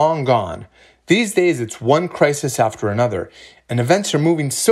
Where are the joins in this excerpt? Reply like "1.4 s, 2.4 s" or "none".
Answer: none